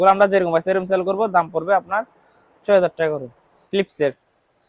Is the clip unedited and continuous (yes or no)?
no